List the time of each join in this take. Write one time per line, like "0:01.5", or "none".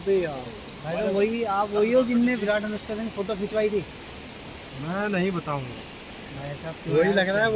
none